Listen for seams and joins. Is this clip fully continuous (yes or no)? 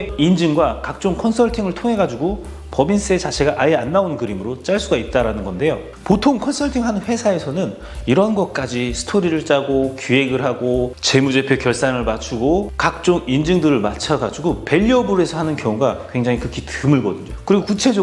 no